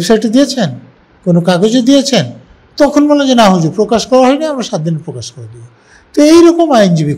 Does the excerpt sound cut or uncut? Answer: uncut